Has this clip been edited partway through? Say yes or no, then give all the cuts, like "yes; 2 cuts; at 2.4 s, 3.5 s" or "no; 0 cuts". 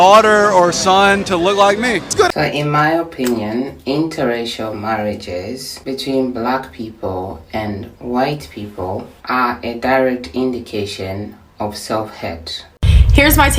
yes; 2 cuts; at 2.3 s, 12.7 s